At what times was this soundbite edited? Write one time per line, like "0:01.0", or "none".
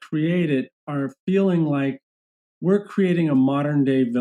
none